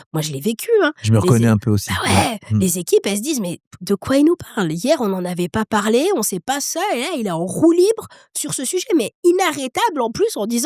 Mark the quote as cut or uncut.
uncut